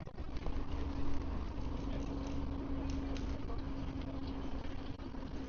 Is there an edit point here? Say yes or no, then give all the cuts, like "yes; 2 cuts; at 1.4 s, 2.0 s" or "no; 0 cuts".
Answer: no; 0 cuts